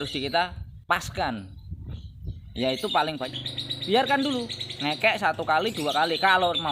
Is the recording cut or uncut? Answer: cut